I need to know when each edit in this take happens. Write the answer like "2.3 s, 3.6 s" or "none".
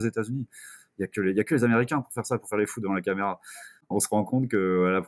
3.7 s